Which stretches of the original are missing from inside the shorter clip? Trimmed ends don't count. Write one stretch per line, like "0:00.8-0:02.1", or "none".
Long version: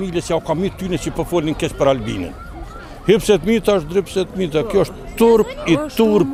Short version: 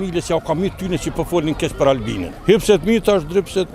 0:02.2-0:02.9

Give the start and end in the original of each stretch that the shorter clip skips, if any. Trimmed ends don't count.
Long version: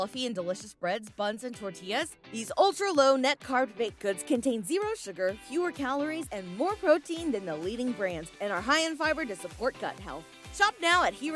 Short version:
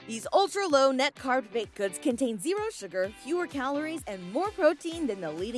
none

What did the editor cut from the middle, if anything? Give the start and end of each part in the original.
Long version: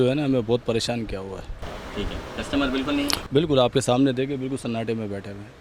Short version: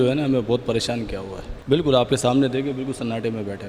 0:01.6-0:03.2

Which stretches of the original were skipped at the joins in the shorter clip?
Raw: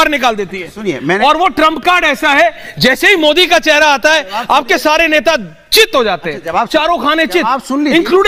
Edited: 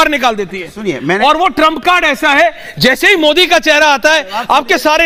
none

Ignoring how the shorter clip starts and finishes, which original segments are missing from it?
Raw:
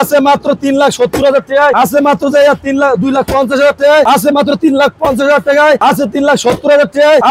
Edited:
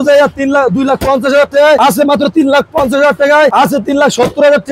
none

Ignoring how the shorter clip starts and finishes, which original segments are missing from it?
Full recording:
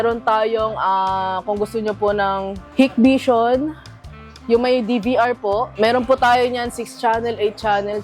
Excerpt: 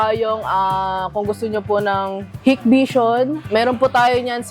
0:03.8-0:05.7

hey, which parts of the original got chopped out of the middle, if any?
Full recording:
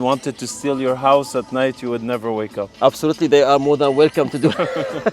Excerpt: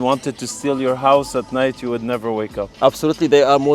none

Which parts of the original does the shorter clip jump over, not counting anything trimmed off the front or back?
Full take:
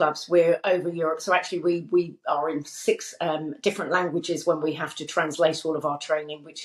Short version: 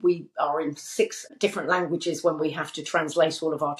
0:03.1-0:03.5

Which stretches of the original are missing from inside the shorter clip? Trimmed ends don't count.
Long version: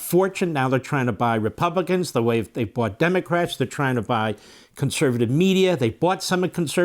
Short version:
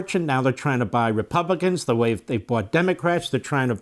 none

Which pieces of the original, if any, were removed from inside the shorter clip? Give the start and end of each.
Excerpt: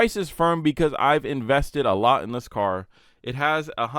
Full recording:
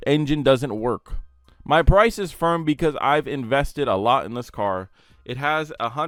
none

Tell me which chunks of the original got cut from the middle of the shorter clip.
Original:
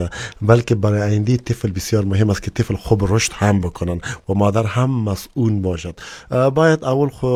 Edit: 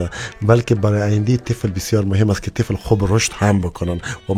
none

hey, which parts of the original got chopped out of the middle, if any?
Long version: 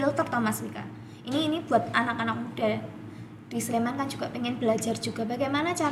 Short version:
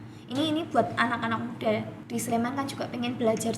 0:02.9-0:03.4

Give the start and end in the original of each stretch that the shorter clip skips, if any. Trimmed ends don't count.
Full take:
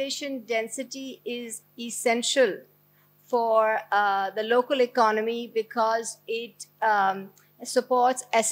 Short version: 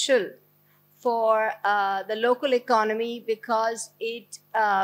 none

